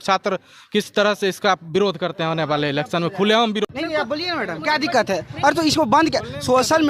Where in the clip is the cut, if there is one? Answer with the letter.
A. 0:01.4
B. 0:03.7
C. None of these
B